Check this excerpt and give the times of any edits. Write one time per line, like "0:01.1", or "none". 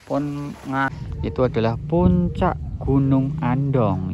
0:00.9